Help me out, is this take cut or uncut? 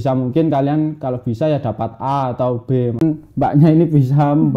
cut